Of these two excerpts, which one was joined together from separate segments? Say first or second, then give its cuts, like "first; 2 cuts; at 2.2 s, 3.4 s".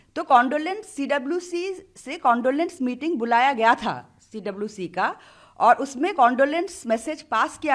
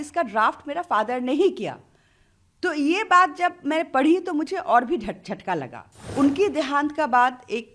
second; 1 cut; at 6.1 s